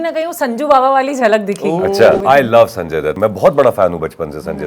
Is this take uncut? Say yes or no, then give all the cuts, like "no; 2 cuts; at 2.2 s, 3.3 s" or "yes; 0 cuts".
no; 2 cuts; at 2.2 s, 3.2 s